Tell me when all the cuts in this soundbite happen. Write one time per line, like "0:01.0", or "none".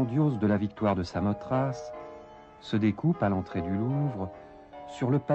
0:01.7